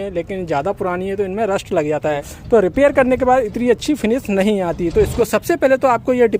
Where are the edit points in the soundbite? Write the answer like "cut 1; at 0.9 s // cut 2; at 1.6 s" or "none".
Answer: cut 1; at 2.3 s // cut 2; at 5.2 s